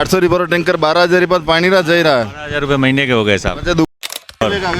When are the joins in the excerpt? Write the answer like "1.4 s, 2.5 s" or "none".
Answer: 3.9 s